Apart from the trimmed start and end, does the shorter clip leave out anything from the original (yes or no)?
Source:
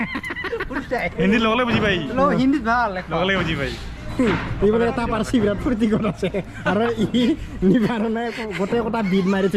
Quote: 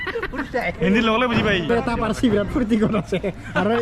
yes